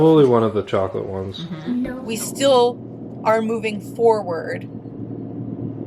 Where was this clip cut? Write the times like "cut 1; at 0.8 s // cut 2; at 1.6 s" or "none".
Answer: cut 1; at 2.0 s

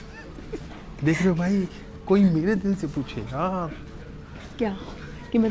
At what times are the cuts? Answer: none

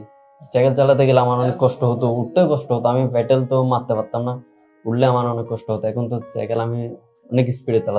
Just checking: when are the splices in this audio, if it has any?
none

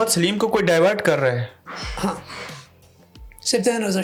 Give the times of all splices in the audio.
none

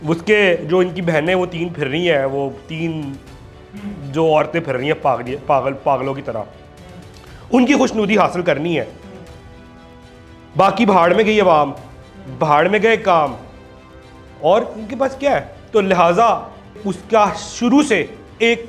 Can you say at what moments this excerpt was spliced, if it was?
none

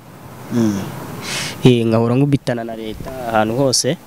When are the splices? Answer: none

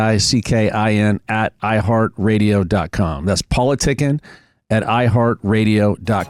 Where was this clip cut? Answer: none

